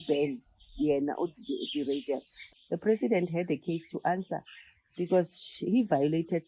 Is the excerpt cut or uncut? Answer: cut